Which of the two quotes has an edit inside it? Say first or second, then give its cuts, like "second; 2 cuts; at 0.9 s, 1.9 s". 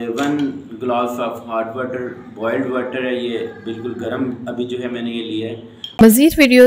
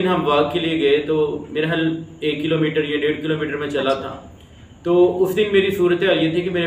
first; 1 cut; at 5.8 s